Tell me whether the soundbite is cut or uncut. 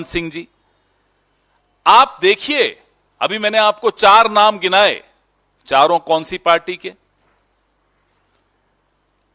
uncut